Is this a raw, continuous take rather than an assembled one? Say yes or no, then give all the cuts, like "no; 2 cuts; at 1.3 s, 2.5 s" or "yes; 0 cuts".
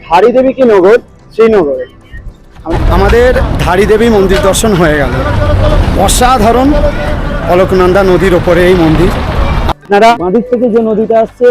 no; 2 cuts; at 2.7 s, 10.1 s